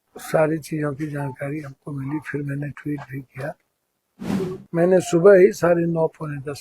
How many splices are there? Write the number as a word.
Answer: one